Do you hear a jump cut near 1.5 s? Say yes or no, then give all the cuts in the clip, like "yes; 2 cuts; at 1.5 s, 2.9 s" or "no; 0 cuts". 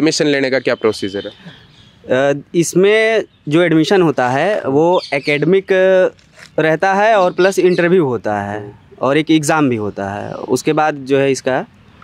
no; 0 cuts